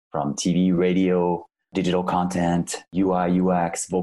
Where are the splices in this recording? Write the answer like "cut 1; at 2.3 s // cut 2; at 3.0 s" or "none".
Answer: cut 1; at 1.7 s // cut 2; at 2.9 s